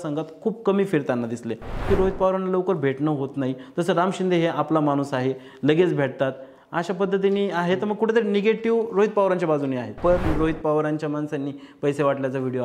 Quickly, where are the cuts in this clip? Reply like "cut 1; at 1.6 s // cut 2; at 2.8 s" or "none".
cut 1; at 1.8 s // cut 2; at 10.3 s